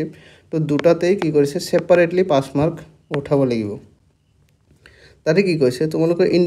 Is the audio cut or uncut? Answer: uncut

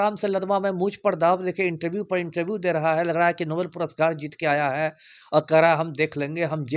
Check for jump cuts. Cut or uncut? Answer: uncut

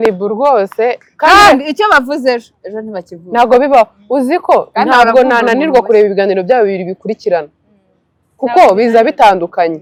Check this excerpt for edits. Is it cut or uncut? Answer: uncut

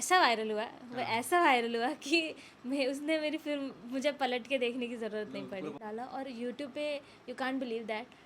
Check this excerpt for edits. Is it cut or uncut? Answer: cut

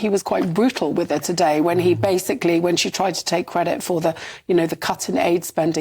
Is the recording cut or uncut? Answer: uncut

